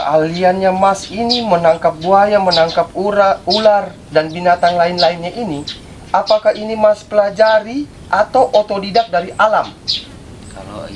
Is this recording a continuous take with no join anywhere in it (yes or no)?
yes